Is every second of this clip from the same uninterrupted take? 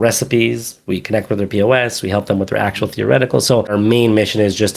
no; 1 cut; at 3.7 s

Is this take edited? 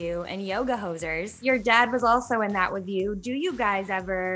yes; 1 cut; at 1.3 s

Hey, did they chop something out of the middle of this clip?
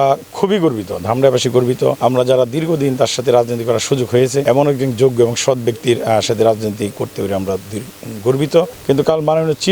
yes; 3 cuts; at 2.0 s, 4.4 s, 8.8 s

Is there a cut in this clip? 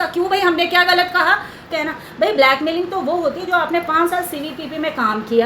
yes; 1 cut; at 1.7 s

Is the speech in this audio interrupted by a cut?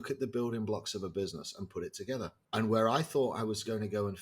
yes; 1 cut; at 2.4 s

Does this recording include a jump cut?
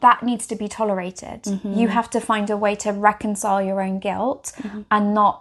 no; 0 cuts

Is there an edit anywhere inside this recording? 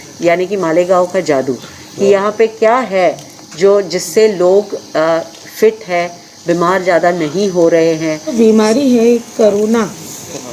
yes; 1 cut; at 8.3 s

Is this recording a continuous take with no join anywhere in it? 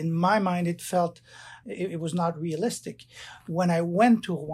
no; 1 cut; at 1.6 s

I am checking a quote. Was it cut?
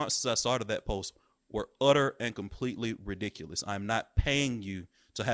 no; 0 cuts

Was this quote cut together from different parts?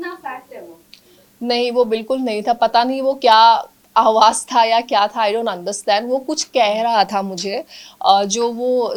no; 0 cuts

